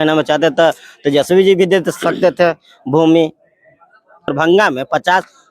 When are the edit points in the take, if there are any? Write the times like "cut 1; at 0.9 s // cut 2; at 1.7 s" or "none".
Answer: cut 1; at 4.3 s